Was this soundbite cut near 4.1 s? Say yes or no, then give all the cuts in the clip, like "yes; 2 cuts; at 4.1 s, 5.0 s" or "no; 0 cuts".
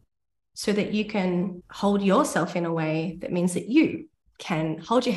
no; 1 cut; at 1.6 s